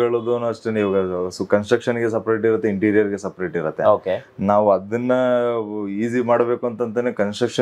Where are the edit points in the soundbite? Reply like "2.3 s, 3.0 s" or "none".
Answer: none